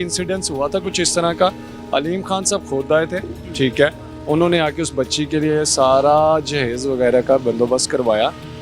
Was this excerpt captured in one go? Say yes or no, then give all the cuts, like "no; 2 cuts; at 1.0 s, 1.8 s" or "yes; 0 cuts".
yes; 0 cuts